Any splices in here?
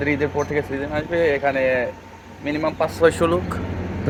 no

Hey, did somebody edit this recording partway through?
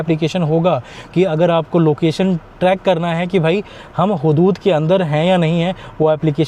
no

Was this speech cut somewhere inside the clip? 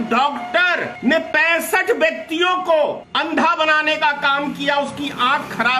yes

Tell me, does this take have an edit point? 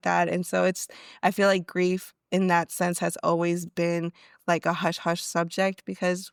no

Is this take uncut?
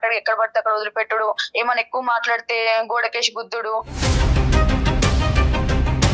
yes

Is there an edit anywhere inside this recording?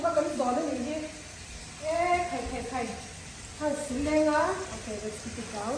no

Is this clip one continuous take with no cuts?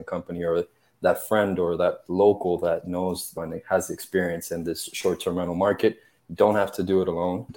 yes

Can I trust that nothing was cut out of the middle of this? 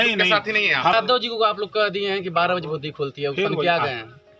no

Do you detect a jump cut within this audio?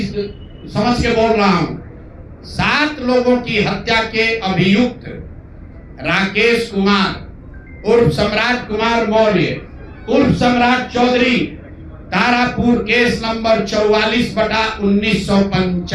no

